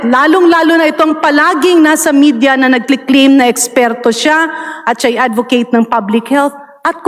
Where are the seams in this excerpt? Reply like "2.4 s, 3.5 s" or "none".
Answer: none

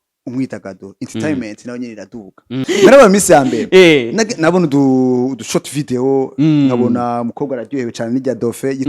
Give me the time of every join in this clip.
2.5 s

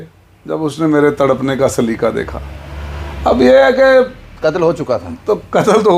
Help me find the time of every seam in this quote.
none

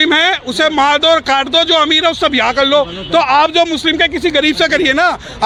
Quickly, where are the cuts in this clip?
none

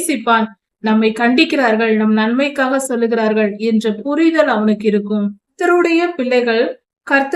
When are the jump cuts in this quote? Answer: 5.6 s

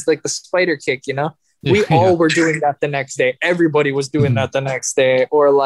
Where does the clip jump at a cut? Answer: none

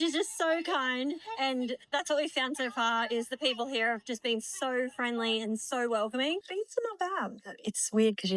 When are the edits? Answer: 6.4 s

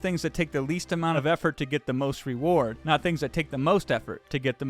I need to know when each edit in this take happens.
1.2 s

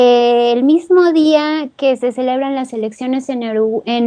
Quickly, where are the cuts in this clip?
1.7 s

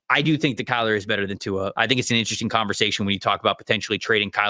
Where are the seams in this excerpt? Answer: 1.7 s

